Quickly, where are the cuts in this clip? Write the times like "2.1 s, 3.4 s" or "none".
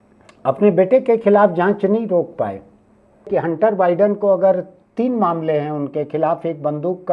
3.3 s